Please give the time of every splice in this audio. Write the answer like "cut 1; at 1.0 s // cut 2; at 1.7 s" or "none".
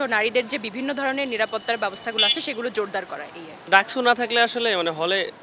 cut 1; at 3.5 s